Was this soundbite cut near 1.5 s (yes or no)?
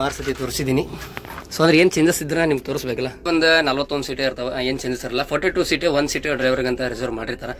no